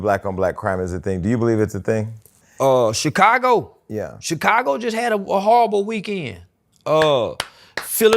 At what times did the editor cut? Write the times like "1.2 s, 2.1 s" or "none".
2.4 s